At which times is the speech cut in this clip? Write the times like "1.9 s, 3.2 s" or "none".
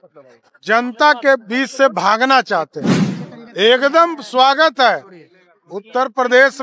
none